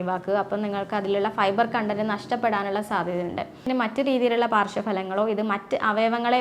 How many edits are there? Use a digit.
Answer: 1